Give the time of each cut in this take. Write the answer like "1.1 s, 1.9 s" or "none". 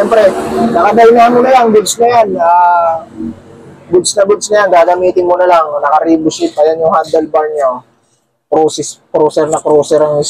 none